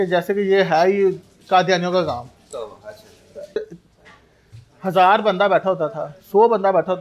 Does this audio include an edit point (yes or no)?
yes